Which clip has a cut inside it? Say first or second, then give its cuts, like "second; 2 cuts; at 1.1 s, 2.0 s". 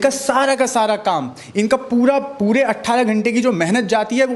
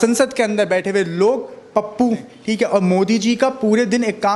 second; 1 cut; at 2.3 s